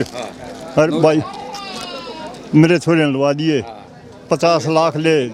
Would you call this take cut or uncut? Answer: uncut